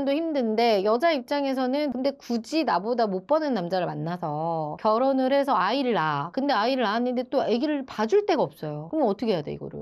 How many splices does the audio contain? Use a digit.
1